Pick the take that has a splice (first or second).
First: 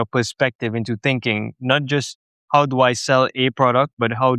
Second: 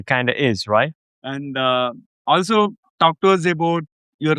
second